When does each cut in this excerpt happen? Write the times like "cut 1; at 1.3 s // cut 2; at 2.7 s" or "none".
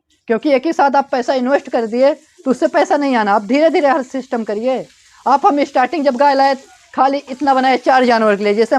none